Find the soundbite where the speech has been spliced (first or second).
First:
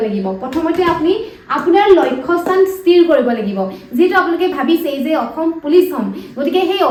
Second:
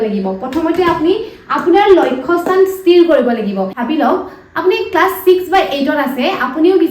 second